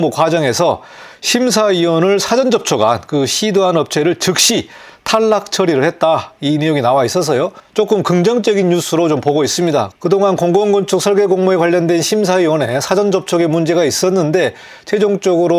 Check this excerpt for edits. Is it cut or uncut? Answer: uncut